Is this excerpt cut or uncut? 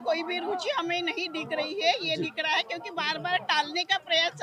uncut